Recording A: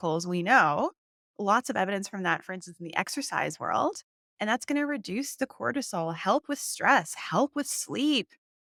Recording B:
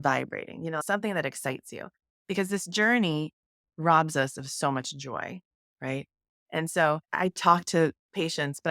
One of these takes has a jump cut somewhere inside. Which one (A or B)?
B